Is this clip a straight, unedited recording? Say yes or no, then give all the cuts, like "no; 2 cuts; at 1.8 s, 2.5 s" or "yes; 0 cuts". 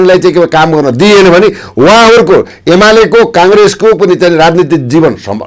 yes; 0 cuts